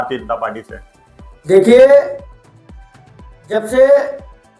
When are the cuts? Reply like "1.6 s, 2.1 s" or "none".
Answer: none